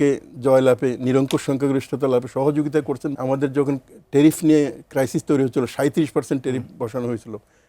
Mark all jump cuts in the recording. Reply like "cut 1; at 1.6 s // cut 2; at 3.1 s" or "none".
cut 1; at 3.1 s